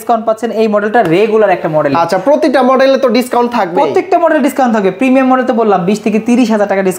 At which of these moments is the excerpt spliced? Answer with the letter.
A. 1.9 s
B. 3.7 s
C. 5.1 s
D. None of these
D